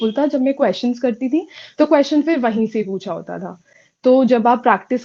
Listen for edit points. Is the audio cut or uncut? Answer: uncut